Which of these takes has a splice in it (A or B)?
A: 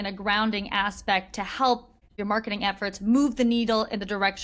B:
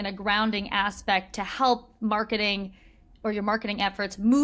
A